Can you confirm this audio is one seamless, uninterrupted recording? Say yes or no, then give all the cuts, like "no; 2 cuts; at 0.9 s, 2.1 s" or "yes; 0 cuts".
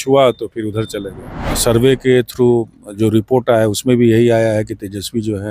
no; 1 cut; at 1.5 s